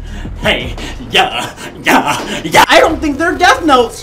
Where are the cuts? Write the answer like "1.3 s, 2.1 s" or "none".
none